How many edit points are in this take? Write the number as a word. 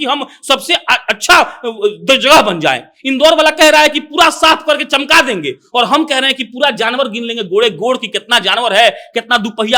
zero